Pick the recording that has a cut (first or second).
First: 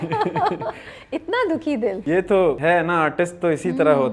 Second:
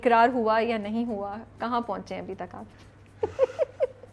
first